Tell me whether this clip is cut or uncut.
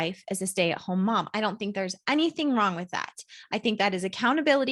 uncut